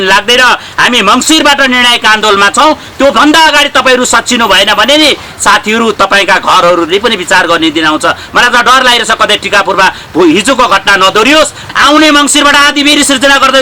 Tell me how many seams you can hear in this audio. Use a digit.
1